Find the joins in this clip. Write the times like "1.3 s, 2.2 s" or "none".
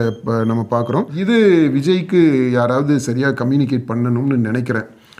1.1 s